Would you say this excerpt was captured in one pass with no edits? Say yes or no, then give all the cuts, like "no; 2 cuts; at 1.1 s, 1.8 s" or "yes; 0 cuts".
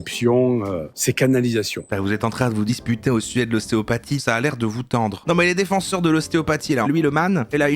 no; 5 cuts; at 0.9 s, 1.8 s, 4.2 s, 5.2 s, 6.9 s